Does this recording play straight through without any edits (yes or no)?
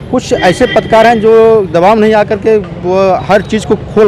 yes